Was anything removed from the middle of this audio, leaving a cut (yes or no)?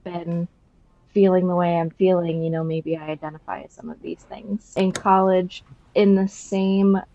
yes